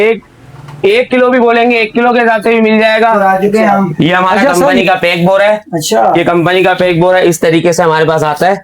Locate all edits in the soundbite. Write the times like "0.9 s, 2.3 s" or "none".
3.2 s